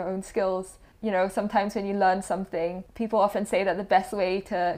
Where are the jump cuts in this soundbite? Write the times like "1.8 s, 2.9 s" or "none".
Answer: 0.9 s, 2.9 s